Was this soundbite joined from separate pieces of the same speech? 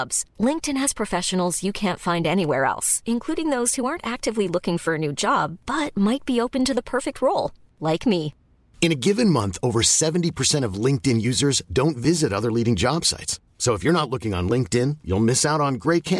no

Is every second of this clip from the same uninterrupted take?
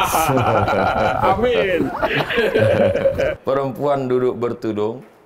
no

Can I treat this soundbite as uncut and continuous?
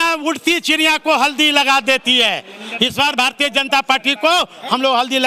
yes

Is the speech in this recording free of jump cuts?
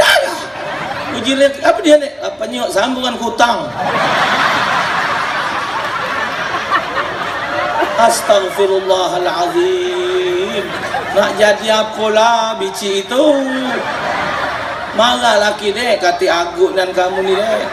yes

